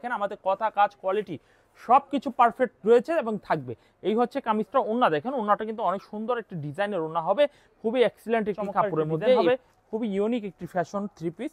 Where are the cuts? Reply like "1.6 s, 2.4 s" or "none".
9.4 s